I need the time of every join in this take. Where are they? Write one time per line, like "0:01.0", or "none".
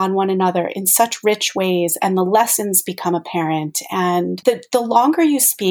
0:04.4